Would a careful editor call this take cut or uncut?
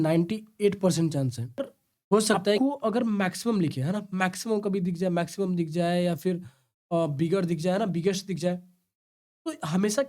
cut